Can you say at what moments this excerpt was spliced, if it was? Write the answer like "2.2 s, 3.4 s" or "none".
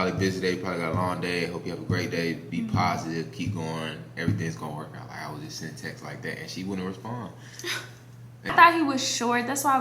8.5 s